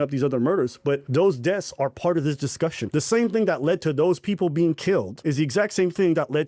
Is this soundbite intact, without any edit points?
no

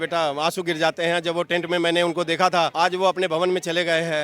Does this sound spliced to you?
no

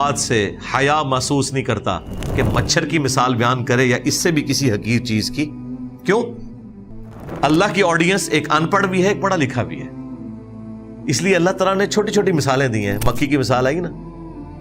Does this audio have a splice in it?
no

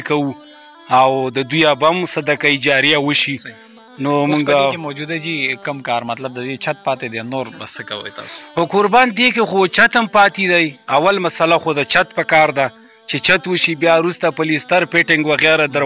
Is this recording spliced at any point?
no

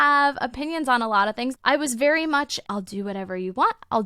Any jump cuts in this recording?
yes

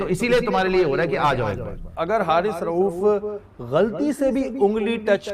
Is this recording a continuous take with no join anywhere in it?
no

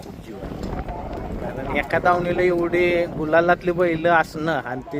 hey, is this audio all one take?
no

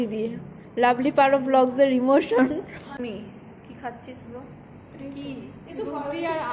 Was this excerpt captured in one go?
no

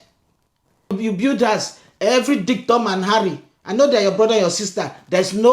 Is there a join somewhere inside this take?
yes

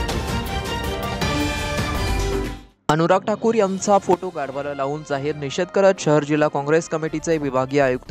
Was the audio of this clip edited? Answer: no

